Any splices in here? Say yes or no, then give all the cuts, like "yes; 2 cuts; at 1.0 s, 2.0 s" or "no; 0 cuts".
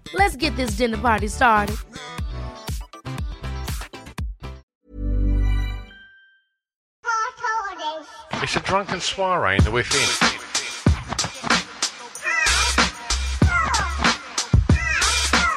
yes; 2 cuts; at 4.7 s, 6.9 s